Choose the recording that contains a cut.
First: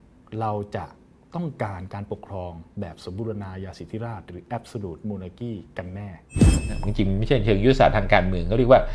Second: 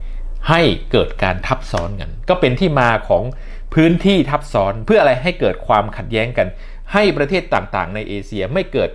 first; 1 cut; at 6.8 s

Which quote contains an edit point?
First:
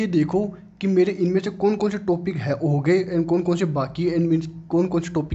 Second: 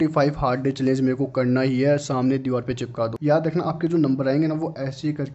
second; 1 cut; at 3.2 s

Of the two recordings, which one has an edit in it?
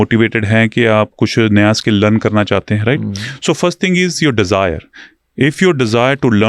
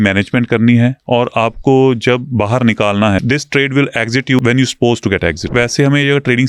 second; 3 cuts; at 3.2 s, 4.4 s, 5.4 s

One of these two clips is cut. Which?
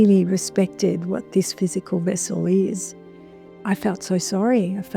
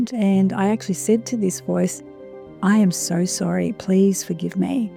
first; 1 cut; at 3.6 s

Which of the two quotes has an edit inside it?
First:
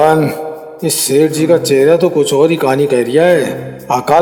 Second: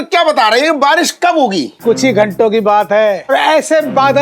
second; 2 cuts; at 1.7 s, 3.3 s

